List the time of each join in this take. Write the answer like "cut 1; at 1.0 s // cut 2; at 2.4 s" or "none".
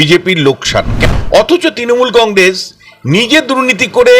cut 1; at 0.9 s